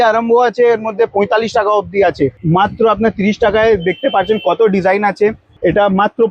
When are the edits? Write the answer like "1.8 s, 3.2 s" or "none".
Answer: 2.4 s, 5.5 s